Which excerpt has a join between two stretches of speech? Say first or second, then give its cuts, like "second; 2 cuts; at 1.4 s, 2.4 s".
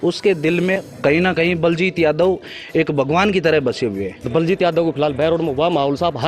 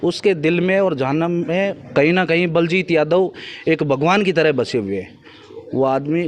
first; 2 cuts; at 0.8 s, 4.2 s